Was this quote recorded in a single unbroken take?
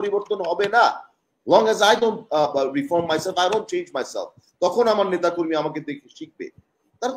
yes; 0 cuts

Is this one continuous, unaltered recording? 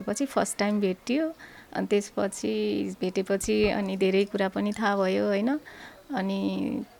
yes; 0 cuts

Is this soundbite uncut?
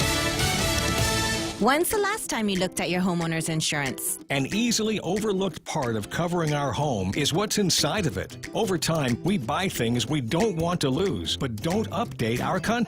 no; 1 cut; at 1.5 s

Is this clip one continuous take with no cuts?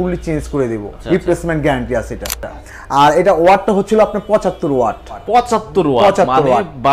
no; 3 cuts; at 0.9 s, 2.6 s, 5.2 s

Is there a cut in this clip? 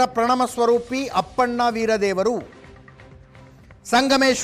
no; 0 cuts

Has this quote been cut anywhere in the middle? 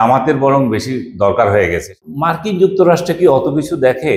yes; 1 cut; at 1.9 s

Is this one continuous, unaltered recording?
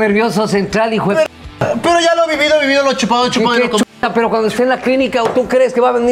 yes; 0 cuts

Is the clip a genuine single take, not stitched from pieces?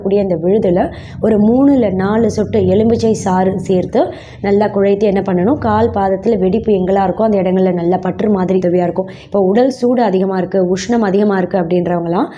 no; 1 cut; at 8.6 s

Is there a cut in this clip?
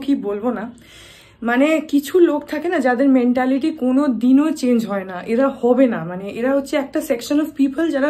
no; 0 cuts

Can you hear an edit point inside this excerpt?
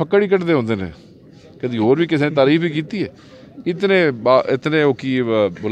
no; 0 cuts

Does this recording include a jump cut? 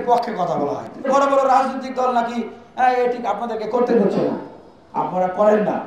yes; 1 cut; at 1.1 s

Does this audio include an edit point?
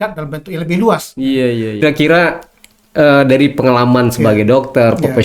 yes; 1 cut; at 1.8 s

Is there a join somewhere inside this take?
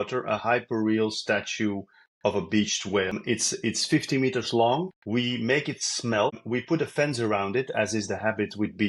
yes; 3 cuts; at 3.2 s, 5.0 s, 6.4 s

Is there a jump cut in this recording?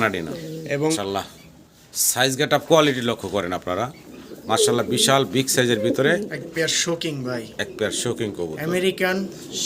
yes; 1 cut; at 0.9 s

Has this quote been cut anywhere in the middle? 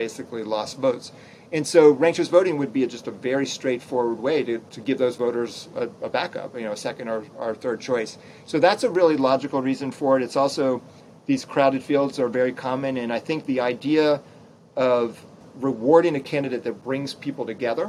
yes; 1 cut; at 15.4 s

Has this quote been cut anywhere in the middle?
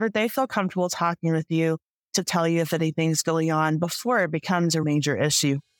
yes; 1 cut; at 4.8 s

